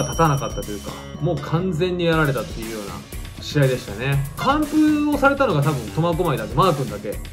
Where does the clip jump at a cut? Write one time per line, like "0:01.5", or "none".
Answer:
none